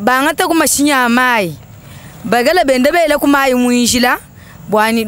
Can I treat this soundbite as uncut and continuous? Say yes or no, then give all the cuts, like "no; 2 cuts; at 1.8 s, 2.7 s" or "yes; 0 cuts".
yes; 0 cuts